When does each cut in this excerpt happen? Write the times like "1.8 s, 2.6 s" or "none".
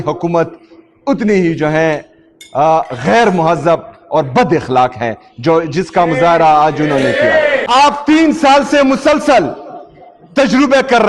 7.6 s